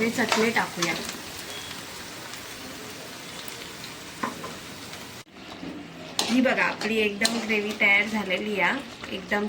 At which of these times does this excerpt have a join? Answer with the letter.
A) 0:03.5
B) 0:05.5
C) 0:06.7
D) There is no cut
B